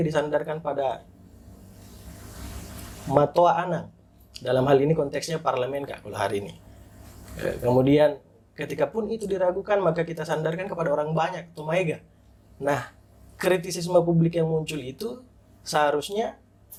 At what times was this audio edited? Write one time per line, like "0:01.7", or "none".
none